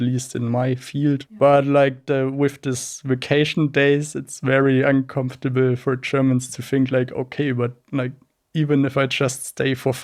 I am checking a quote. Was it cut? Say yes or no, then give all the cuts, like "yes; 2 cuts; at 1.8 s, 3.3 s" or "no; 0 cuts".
yes; 1 cut; at 1.3 s